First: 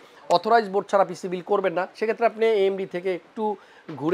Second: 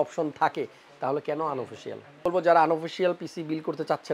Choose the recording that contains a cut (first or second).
second